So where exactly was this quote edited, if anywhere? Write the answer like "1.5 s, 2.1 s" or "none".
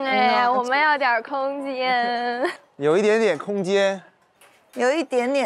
none